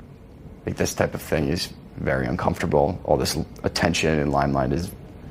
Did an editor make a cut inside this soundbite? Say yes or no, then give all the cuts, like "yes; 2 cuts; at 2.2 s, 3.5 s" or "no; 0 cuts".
yes; 1 cut; at 3.1 s